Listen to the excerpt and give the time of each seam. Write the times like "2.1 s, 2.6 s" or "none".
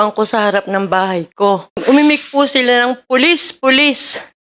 1.8 s